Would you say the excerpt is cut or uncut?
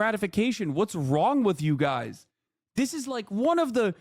cut